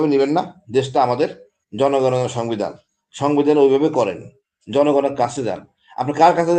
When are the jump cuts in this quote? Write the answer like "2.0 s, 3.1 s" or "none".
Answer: none